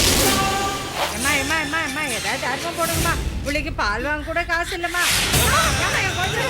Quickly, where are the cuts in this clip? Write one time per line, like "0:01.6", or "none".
0:01.0